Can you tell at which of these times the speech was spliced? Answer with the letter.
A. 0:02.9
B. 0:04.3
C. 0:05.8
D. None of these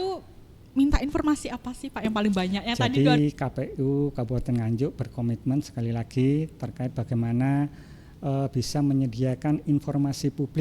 A